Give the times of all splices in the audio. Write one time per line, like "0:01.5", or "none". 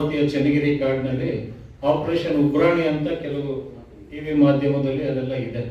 none